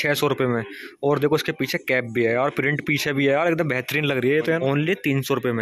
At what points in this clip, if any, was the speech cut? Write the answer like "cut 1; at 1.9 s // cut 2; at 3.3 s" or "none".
cut 1; at 4.6 s